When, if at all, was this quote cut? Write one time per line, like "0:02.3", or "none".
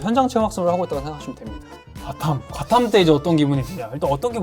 0:02.0

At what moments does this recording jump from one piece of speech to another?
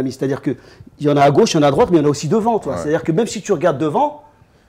none

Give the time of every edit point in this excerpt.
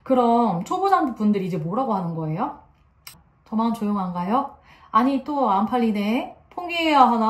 0:03.1

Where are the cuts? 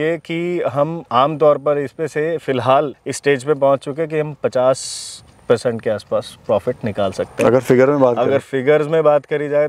0:01.0
0:03.0

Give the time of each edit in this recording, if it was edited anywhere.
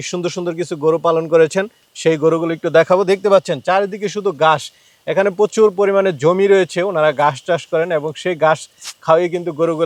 none

